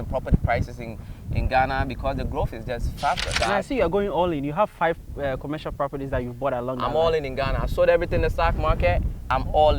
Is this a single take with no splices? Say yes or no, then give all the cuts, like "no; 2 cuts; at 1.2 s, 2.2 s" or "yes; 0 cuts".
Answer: no; 1 cut; at 3.3 s